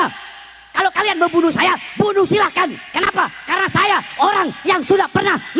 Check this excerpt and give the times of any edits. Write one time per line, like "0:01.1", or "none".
none